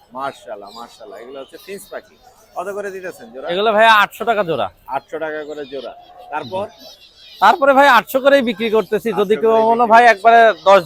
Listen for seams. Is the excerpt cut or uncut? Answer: uncut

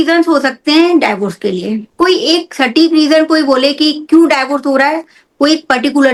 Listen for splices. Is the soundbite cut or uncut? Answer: uncut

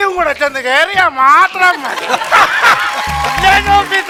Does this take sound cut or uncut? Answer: uncut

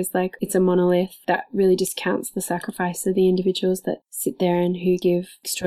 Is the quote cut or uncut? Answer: cut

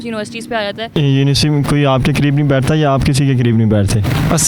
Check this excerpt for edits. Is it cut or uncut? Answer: cut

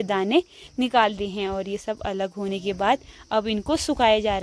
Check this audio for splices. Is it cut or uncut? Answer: uncut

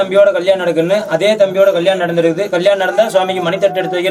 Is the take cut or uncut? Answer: uncut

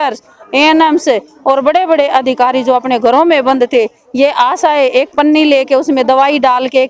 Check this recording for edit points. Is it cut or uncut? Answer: uncut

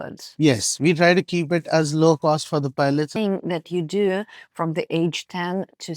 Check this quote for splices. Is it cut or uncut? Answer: cut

